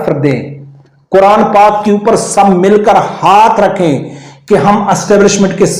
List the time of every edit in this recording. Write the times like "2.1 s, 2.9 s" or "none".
none